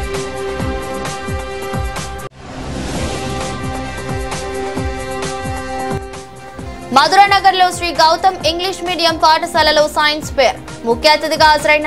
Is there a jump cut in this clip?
yes; 1 cut; at 2.2 s

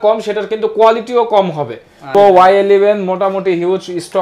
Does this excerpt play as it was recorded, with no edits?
no; 1 cut; at 2.1 s

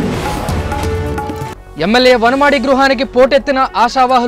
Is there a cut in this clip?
yes; 1 cut; at 1.4 s

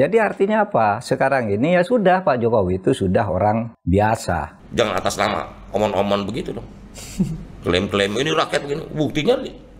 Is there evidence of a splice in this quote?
yes; 1 cut; at 4.5 s

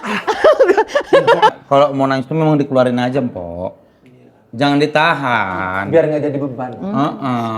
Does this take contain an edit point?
yes; 1 cut; at 1.5 s

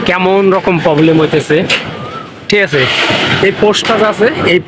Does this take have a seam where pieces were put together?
no; 0 cuts

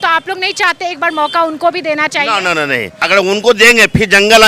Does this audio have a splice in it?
yes; 1 cut; at 3.0 s

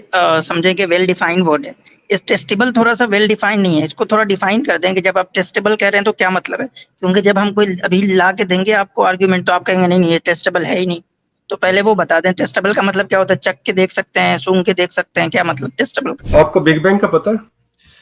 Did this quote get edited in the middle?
yes; 1 cut; at 16.2 s

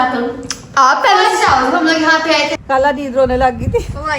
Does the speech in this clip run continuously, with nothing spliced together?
no; 1 cut; at 2.6 s

